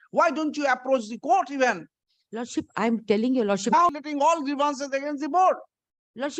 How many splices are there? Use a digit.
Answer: 1